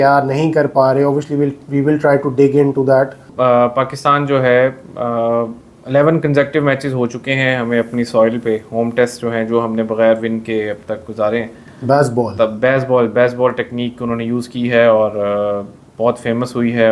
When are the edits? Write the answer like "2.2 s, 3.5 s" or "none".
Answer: 3.3 s, 11.7 s